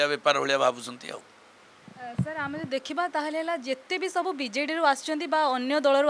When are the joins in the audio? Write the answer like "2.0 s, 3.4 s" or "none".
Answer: none